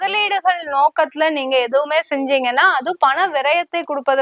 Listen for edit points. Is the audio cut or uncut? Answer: uncut